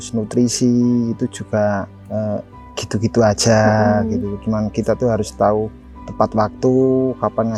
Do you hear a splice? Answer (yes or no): no